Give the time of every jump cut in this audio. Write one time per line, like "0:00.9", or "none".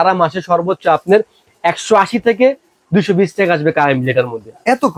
none